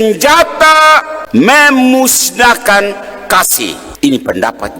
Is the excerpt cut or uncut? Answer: cut